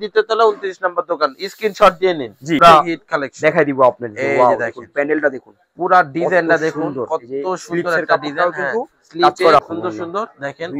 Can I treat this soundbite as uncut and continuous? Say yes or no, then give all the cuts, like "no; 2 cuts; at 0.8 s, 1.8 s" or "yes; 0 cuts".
no; 2 cuts; at 2.6 s, 9.6 s